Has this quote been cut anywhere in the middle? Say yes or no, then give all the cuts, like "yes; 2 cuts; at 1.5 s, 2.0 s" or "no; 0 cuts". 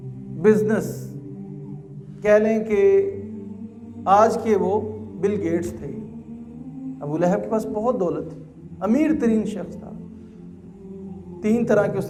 no; 0 cuts